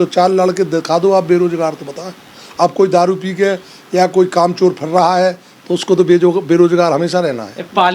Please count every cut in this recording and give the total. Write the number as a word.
zero